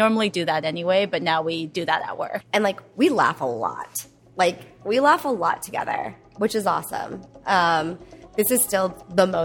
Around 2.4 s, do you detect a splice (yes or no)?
yes